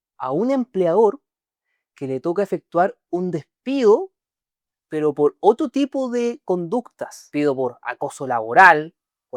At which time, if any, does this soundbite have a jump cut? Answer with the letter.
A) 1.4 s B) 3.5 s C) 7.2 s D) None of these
C